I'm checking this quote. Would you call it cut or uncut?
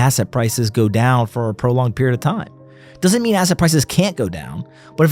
uncut